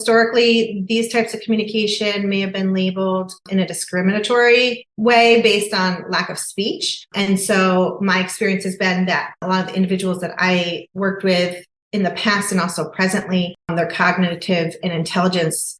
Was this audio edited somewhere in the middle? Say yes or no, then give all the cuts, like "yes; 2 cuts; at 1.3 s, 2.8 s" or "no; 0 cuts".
yes; 2 cuts; at 9.4 s, 13.7 s